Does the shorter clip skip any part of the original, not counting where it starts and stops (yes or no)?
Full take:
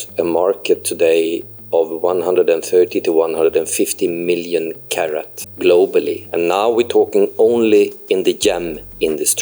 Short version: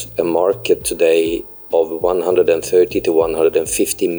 no